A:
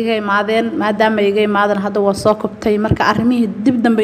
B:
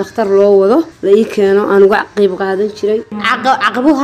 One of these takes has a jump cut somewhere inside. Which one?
B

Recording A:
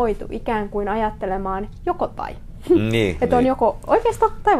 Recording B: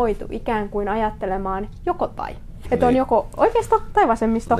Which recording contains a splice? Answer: B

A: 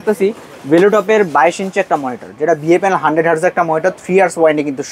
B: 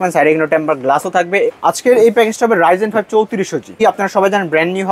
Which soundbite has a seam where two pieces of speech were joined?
B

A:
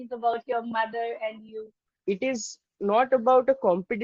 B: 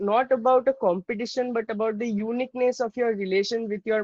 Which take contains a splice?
A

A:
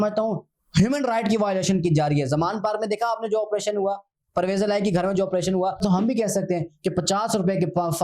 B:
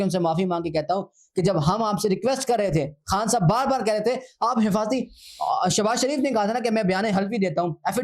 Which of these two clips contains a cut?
A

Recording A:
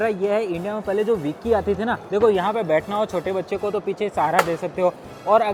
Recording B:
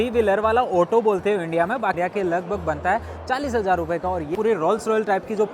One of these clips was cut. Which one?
B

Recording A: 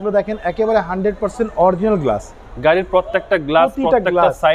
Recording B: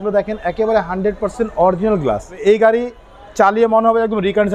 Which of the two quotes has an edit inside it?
B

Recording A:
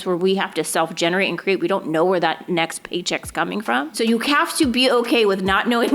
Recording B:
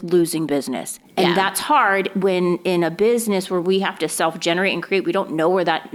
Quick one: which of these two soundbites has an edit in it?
A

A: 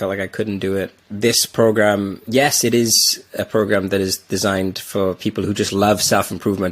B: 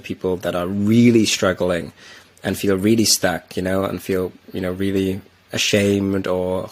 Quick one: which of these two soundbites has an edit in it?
A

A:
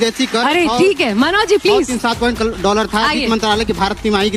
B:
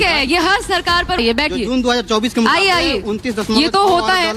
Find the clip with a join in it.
B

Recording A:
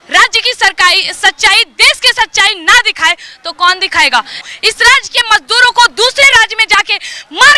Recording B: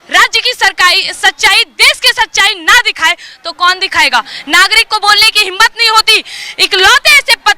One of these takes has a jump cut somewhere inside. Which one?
A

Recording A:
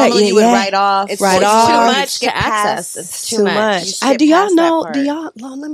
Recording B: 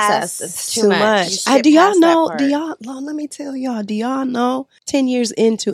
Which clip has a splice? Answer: B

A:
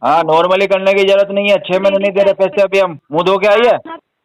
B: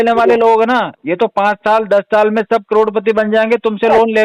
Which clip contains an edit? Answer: A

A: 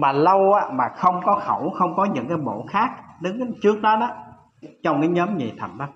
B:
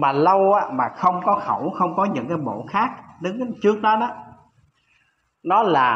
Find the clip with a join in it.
A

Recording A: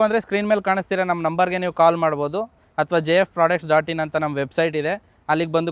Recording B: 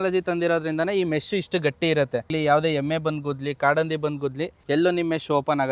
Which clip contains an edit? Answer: B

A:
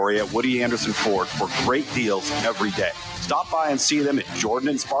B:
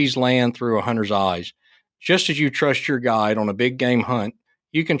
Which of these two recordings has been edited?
B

